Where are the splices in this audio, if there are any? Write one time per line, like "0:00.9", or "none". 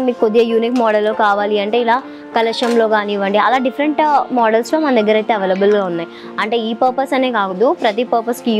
none